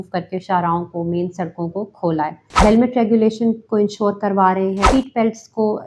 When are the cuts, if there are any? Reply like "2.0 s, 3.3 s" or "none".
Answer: 2.6 s, 4.8 s